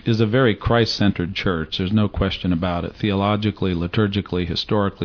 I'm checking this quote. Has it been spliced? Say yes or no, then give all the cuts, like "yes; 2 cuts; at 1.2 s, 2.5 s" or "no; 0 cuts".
no; 0 cuts